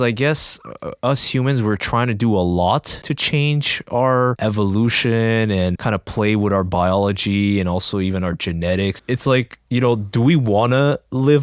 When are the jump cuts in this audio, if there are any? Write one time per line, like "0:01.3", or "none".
0:03.0
0:04.4
0:05.8
0:09.0